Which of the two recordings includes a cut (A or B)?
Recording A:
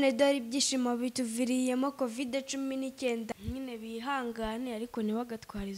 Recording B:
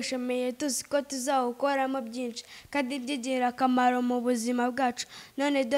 A